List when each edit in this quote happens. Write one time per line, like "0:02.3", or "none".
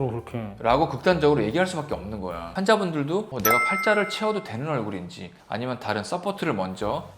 0:02.4